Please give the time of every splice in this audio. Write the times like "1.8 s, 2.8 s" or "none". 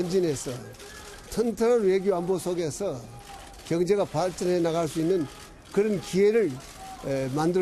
none